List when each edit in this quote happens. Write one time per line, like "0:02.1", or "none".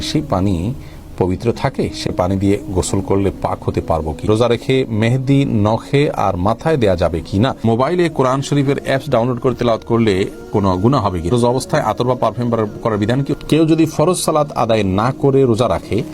0:04.2
0:07.6
0:11.3
0:13.3